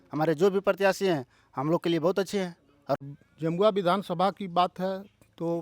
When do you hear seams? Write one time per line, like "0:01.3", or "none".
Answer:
0:03.0